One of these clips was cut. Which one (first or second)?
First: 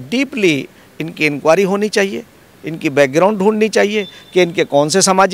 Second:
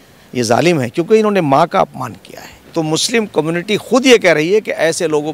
second